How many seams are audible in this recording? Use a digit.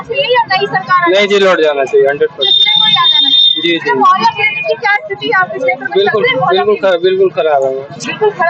0